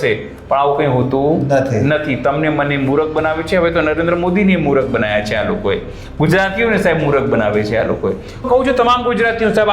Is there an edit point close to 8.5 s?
yes; 1 cut; at 8.5 s

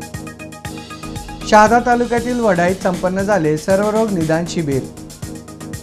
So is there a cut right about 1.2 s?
no; 0 cuts

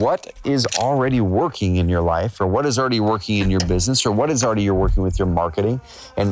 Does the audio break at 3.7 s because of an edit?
no; 0 cuts

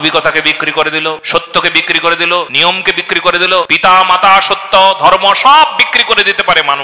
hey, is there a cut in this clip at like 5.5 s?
no; 3 cuts; at 1.2 s, 2.5 s, 3.7 s

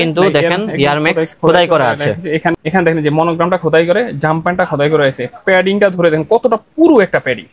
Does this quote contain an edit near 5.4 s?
no; 1 cut; at 2.6 s

